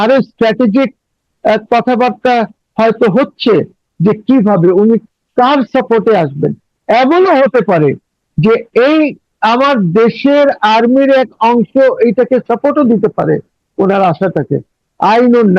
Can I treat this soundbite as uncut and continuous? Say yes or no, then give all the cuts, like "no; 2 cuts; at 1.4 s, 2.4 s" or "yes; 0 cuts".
yes; 0 cuts